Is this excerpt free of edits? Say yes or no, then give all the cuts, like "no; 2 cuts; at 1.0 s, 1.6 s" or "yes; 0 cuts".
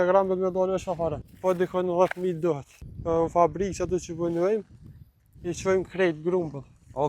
no; 2 cuts; at 1.3 s, 2.7 s